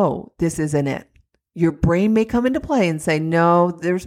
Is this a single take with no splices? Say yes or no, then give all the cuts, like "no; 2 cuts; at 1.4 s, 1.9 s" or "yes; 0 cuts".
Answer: yes; 0 cuts